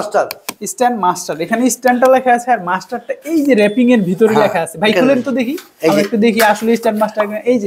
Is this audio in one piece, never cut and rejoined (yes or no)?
yes